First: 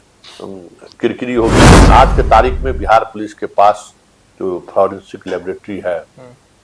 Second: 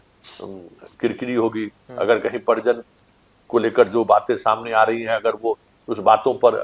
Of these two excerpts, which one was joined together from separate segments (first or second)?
first